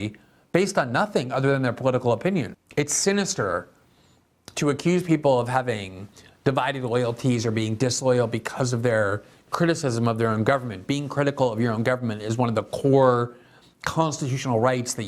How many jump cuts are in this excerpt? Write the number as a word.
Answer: one